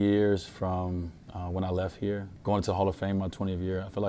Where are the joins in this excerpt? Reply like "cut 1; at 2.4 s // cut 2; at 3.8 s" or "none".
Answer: cut 1; at 2.3 s